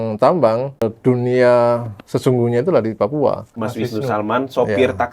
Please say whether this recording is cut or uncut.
cut